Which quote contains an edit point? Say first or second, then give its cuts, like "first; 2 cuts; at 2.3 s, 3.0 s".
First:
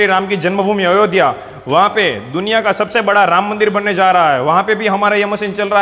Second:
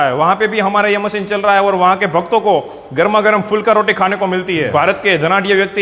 second; 1 cut; at 4.7 s